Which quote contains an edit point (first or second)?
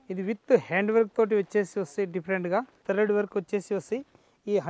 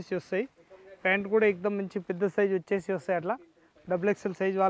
first